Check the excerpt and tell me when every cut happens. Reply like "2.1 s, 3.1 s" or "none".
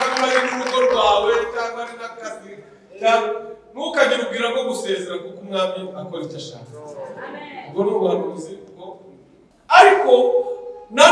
9.5 s